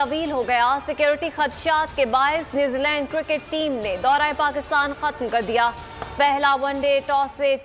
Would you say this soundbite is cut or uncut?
uncut